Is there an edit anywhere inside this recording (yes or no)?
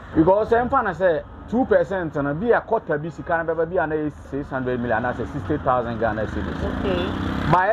yes